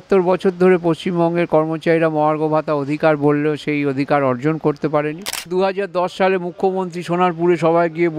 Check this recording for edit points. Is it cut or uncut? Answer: cut